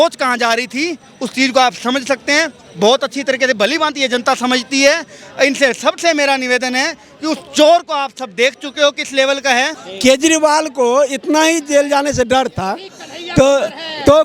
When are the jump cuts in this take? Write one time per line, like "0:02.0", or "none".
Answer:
0:09.8